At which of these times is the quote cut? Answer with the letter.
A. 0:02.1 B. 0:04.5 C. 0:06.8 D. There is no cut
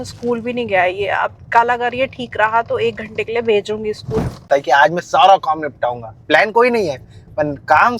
B